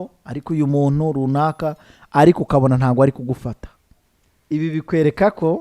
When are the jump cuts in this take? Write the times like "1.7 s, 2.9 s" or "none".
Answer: none